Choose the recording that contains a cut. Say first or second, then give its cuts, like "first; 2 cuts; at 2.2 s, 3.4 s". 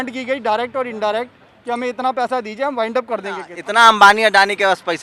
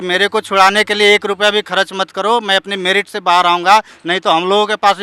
first; 1 cut; at 3.5 s